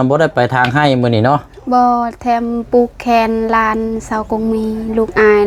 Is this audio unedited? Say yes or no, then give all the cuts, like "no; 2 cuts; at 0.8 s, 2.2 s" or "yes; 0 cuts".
yes; 0 cuts